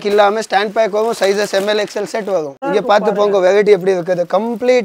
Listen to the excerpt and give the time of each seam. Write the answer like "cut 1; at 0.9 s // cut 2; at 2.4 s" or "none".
cut 1; at 2.5 s